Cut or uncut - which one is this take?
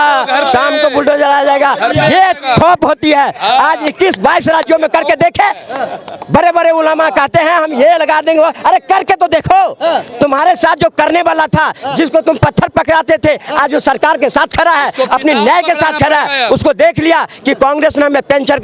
uncut